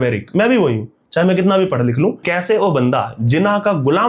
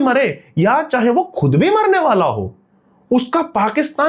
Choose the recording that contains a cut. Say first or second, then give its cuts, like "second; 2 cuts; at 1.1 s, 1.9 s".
first; 1 cut; at 2.2 s